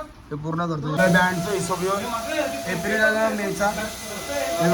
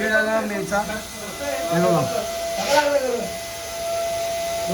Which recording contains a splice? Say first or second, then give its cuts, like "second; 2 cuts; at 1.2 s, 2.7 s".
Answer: first; 1 cut; at 1.0 s